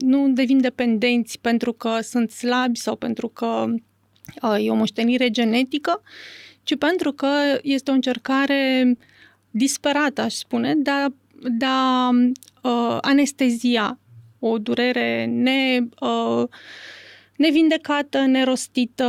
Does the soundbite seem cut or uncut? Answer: uncut